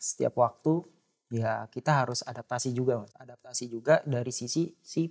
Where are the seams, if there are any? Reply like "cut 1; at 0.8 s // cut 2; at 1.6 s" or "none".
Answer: cut 1; at 3.5 s